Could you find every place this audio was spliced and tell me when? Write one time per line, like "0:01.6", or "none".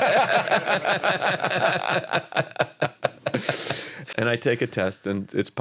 0:03.9